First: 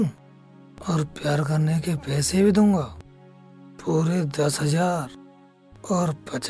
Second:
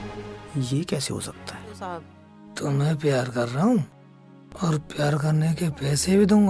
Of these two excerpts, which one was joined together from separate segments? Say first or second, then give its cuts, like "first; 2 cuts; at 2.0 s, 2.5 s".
second; 1 cut; at 2.2 s